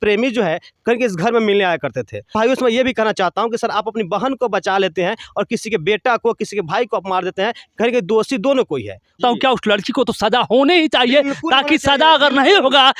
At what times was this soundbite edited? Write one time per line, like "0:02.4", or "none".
0:02.3
0:09.1